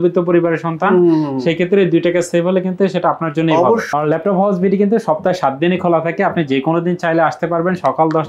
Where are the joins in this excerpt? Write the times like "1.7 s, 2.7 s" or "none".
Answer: 3.9 s